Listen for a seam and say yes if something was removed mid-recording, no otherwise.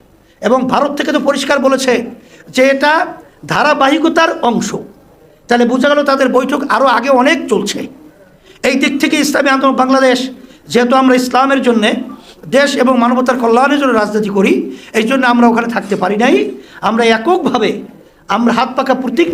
no